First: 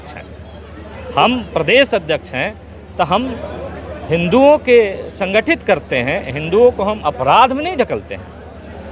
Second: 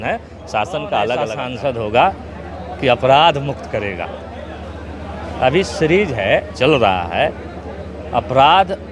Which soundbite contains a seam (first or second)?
second